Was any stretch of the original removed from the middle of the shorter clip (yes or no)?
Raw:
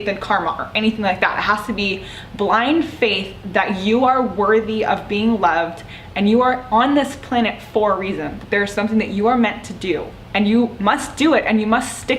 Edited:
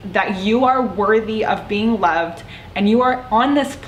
no